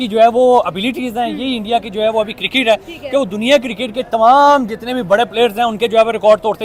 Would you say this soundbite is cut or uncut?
uncut